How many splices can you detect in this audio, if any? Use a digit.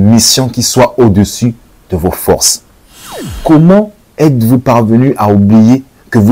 1